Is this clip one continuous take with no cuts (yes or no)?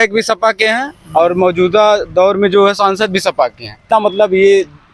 no